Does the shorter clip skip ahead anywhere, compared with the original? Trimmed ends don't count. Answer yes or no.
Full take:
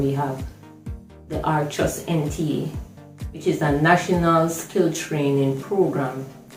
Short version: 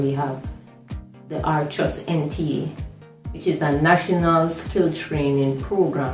no